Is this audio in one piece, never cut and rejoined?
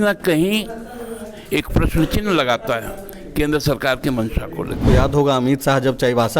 no; 1 cut; at 4.8 s

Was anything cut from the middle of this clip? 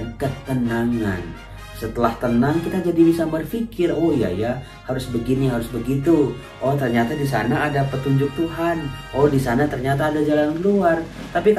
no; 0 cuts

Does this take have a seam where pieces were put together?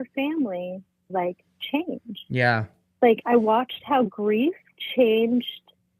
yes; 2 cuts; at 1.1 s, 4.1 s

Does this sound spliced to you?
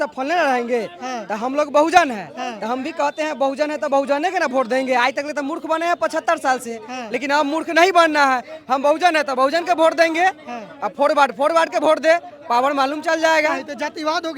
no; 0 cuts

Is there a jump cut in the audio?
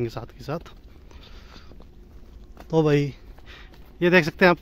no; 0 cuts

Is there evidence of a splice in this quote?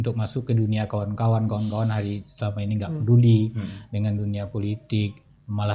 no; 0 cuts

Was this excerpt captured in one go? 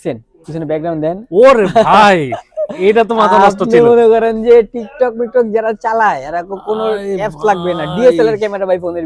yes; 0 cuts

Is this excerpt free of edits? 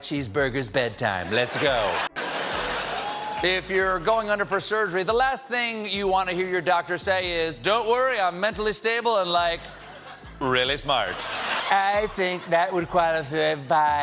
no; 2 cuts; at 2.1 s, 11.5 s

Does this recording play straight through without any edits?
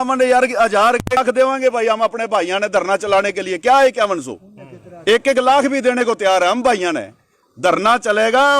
no; 1 cut; at 1.2 s

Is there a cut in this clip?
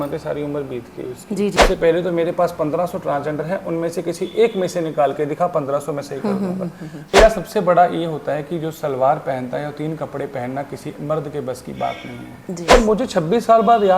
yes; 3 cuts; at 1.6 s, 7.1 s, 12.7 s

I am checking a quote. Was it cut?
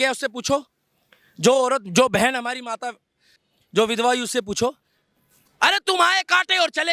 no; 0 cuts

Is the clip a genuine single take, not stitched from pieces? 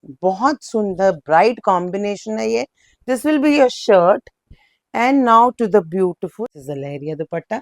no; 1 cut; at 6.4 s

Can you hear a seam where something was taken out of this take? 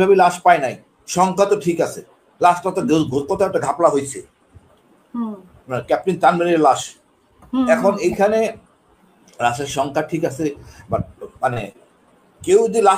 no; 0 cuts

